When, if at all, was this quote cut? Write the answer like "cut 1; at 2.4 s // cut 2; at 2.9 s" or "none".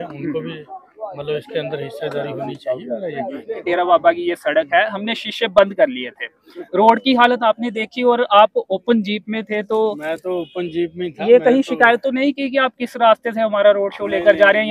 cut 1; at 3.9 s